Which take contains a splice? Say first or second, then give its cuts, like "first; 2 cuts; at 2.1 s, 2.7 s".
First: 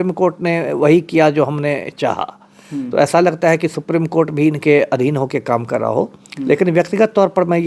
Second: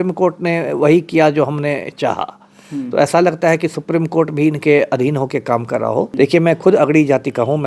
second; 1 cut; at 6.1 s